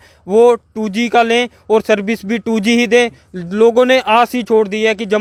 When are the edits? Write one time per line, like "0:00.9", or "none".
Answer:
none